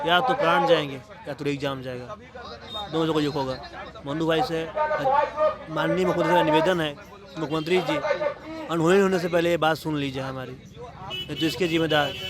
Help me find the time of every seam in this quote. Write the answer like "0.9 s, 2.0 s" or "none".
none